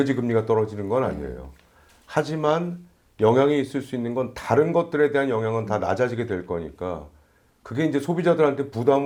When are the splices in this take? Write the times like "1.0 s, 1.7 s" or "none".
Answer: none